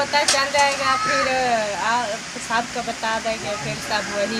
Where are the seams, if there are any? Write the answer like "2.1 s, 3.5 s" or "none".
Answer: none